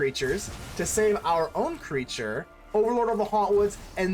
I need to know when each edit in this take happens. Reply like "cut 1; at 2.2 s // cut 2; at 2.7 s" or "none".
cut 1; at 2.5 s